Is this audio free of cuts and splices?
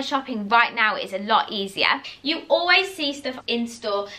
no; 1 cut; at 2.1 s

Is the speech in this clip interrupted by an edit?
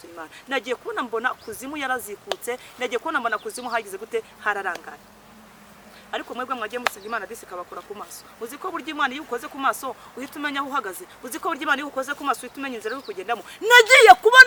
no; 0 cuts

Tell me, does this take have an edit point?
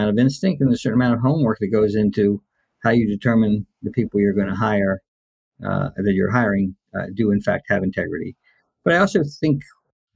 no; 0 cuts

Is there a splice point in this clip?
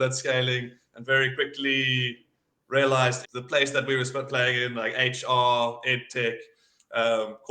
yes; 1 cut; at 3.2 s

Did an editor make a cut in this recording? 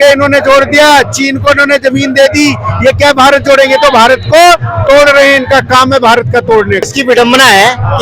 yes; 1 cut; at 6.9 s

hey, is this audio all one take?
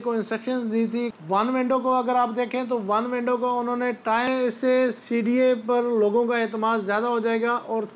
no; 2 cuts; at 1.1 s, 4.3 s

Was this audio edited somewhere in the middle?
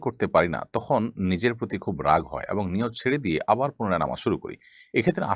no; 0 cuts

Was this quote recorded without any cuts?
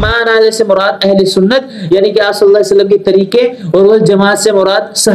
yes; 0 cuts

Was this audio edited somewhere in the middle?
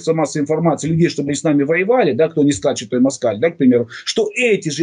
no; 0 cuts

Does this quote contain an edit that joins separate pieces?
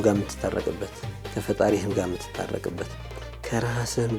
no; 0 cuts

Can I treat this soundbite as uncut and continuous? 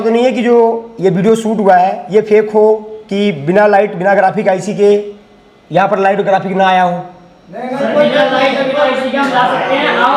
yes; 0 cuts

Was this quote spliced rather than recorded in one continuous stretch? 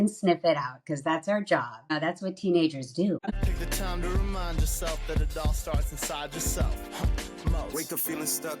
yes; 2 cuts; at 1.9 s, 3.2 s

